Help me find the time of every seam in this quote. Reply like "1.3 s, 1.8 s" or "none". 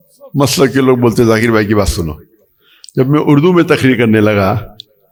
none